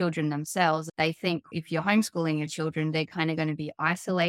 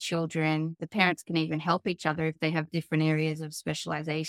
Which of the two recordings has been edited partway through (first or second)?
first